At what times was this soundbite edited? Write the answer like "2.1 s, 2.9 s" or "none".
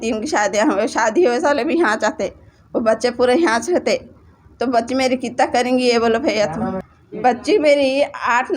6.8 s